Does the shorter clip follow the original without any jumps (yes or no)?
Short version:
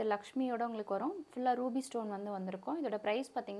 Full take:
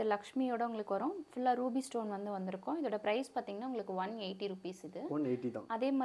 yes